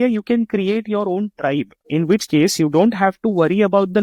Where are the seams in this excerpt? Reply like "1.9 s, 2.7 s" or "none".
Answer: none